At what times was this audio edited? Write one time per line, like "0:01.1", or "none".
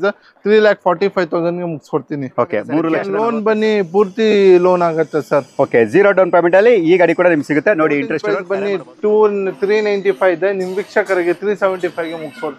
0:03.0
0:08.3